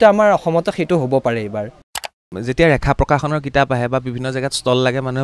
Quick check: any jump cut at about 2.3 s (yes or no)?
yes